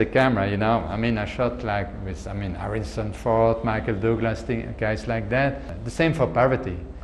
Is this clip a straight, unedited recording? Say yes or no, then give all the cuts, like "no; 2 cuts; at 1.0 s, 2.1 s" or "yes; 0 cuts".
no; 1 cut; at 5.7 s